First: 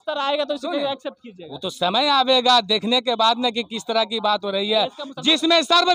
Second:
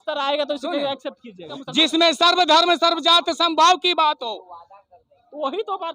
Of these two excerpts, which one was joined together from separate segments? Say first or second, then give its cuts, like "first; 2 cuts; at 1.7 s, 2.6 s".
second; 1 cut; at 1.5 s